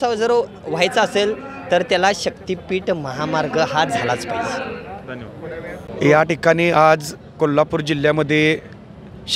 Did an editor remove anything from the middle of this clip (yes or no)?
no